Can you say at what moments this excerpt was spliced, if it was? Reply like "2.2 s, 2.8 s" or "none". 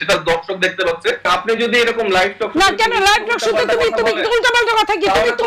1.2 s

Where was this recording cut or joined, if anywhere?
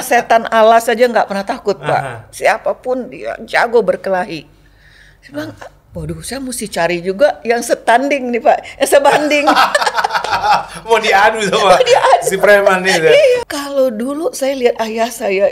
13.4 s

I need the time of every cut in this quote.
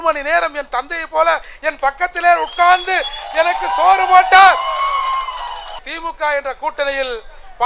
5.7 s

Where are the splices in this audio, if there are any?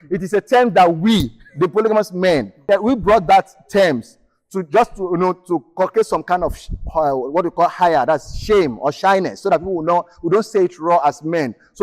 2.6 s

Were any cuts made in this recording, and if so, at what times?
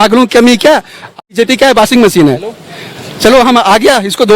1.2 s

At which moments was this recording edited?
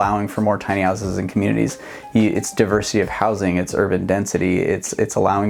none

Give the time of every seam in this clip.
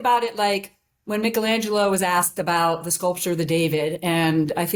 none

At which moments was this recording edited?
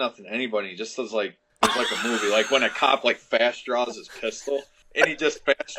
1.4 s, 4.8 s

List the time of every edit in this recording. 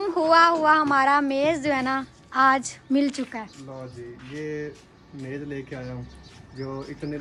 none

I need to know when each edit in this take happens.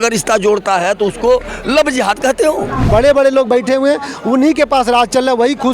2.9 s

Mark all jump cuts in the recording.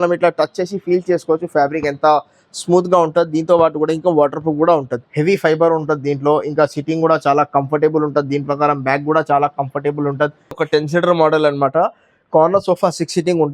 5.0 s, 10.6 s

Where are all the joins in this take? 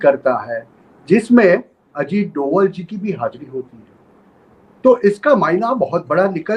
none

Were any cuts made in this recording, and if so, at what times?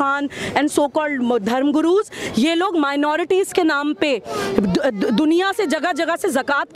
none

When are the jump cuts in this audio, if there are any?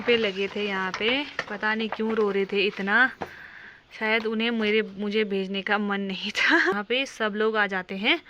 6.8 s

